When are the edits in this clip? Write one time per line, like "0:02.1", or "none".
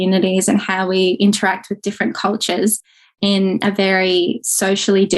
none